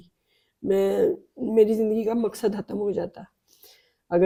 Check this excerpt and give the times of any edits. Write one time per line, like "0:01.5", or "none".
none

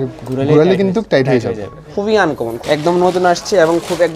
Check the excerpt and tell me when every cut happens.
0:01.8

